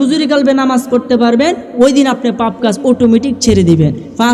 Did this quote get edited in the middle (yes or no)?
no